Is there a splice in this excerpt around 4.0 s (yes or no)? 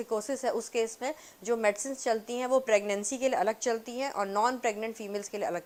no